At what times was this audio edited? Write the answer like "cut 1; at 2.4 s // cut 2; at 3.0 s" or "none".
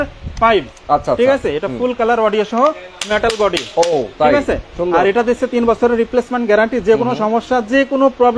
none